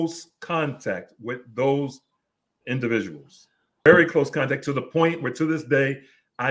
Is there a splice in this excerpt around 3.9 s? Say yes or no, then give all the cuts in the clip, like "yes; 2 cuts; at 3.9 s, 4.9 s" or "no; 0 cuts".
yes; 1 cut; at 3.9 s